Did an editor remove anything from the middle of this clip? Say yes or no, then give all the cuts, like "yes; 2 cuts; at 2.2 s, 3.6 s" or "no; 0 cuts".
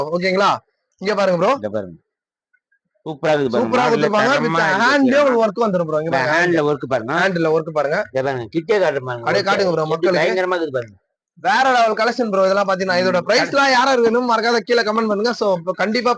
no; 0 cuts